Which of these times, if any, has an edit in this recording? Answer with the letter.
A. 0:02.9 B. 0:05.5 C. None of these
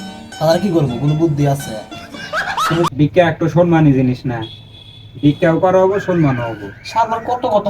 A